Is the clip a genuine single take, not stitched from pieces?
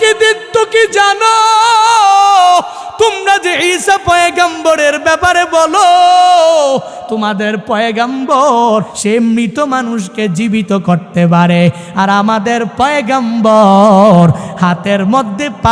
no; 1 cut; at 8.9 s

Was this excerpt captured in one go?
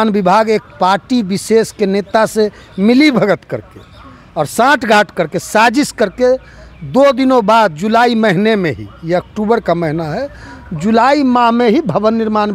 yes; 0 cuts

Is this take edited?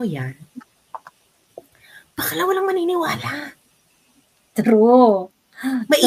no; 0 cuts

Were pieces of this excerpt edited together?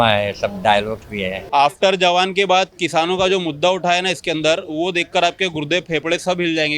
yes; 1 cut; at 1.4 s

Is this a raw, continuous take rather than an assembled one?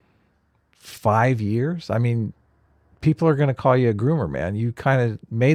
yes; 0 cuts

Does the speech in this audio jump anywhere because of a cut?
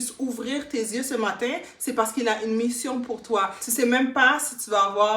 yes; 1 cut; at 3.6 s

